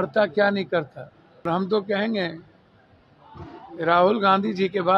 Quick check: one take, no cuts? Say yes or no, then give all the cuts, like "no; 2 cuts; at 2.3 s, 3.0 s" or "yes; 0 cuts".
no; 1 cut; at 1.4 s